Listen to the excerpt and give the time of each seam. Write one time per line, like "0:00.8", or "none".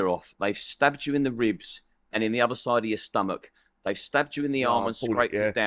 none